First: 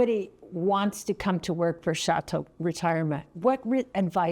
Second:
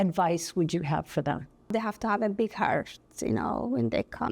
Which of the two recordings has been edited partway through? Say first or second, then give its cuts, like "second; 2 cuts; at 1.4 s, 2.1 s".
second; 1 cut; at 1.7 s